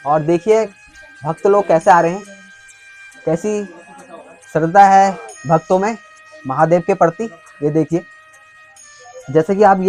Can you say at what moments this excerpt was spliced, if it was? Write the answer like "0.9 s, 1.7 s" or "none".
none